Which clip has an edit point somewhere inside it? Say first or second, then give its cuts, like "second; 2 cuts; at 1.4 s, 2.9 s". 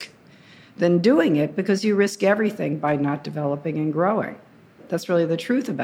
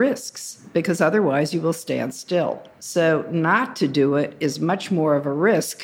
first; 1 cut; at 4.9 s